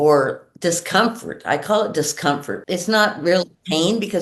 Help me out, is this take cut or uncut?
cut